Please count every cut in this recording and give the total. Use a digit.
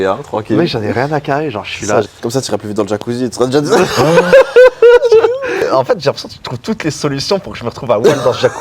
2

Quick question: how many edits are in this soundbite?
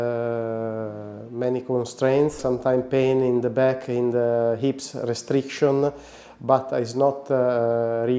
1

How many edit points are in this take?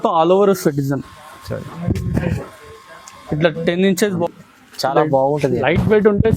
1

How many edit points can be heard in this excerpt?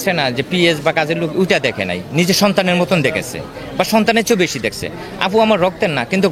0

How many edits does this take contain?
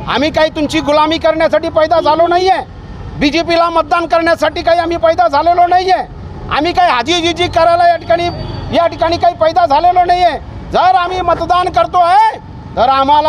0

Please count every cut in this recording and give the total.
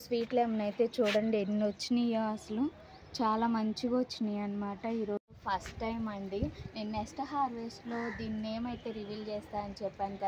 1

